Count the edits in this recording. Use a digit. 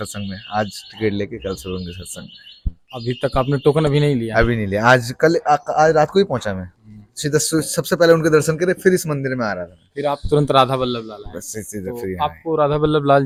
0